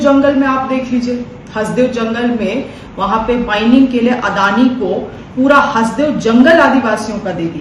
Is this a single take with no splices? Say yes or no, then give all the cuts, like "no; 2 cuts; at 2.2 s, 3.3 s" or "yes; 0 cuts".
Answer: yes; 0 cuts